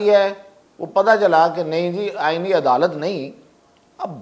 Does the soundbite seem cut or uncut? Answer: uncut